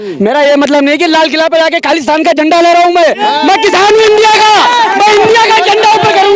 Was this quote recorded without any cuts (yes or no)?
yes